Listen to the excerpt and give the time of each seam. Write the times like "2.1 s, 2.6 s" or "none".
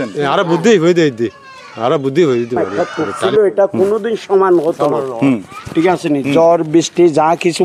2.6 s